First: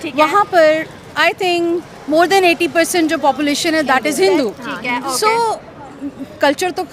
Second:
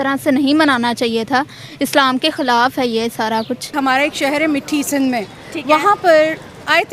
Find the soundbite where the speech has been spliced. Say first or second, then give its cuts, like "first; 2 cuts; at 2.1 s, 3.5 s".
second; 1 cut; at 3.7 s